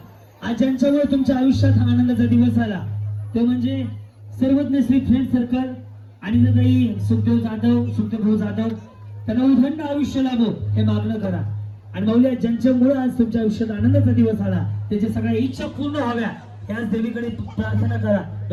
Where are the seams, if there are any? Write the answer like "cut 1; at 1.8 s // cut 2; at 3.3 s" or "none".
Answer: none